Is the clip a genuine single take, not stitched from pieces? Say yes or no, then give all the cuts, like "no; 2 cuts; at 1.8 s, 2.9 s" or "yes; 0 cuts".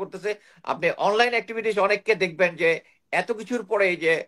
yes; 0 cuts